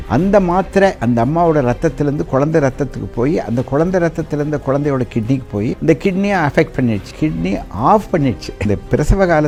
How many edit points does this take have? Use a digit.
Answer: 0